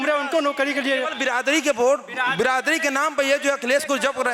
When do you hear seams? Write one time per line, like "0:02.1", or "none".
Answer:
none